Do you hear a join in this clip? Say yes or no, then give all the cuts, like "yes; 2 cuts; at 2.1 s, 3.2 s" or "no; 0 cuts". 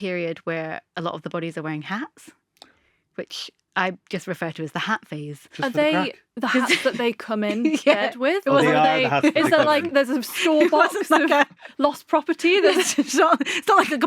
no; 0 cuts